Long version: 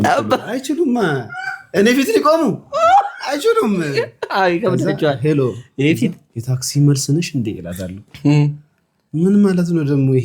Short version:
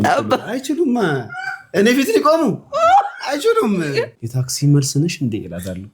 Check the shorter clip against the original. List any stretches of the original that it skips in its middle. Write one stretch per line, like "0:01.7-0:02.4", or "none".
0:04.2-0:06.3